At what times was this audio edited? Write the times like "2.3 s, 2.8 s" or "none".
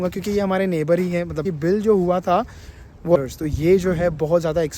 1.5 s, 3.2 s